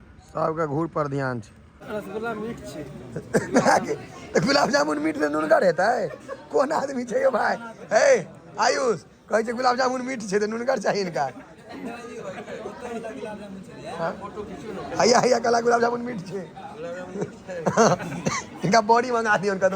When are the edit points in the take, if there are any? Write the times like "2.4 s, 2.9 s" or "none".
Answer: 1.8 s